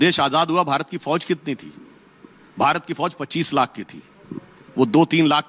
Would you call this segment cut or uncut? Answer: uncut